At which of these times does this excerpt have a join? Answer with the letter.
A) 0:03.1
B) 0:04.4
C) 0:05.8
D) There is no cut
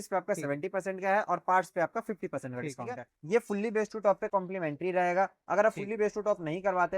A